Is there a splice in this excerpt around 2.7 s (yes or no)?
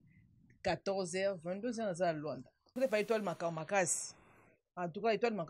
yes